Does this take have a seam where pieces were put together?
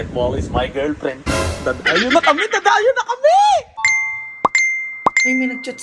yes; 1 cut; at 3.9 s

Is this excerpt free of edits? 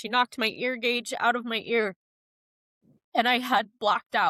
yes; 0 cuts

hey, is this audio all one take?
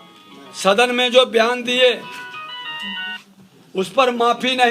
yes; 0 cuts

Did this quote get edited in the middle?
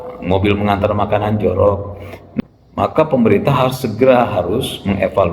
yes; 1 cut; at 2.2 s

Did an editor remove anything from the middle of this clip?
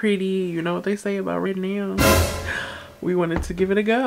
no; 0 cuts

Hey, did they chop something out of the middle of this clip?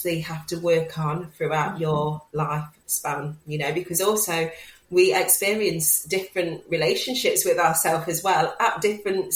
no; 0 cuts

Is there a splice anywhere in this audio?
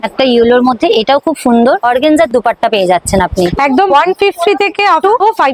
yes; 2 cuts; at 1.8 s, 3.5 s

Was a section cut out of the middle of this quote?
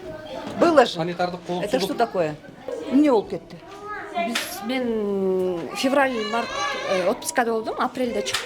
yes; 1 cut; at 2.7 s

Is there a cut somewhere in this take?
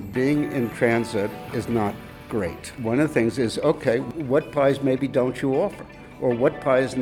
yes; 2 cuts; at 2.8 s, 4.1 s

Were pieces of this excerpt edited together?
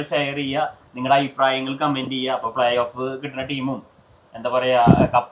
no; 0 cuts

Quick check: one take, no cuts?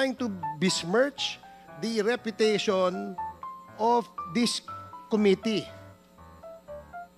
no; 1 cut; at 5.7 s

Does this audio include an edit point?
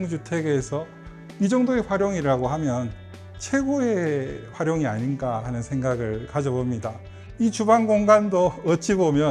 yes; 1 cut; at 7.2 s

